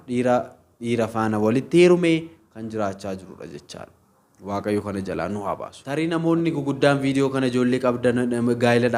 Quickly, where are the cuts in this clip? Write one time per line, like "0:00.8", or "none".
0:05.8